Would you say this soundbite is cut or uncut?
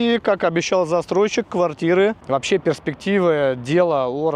cut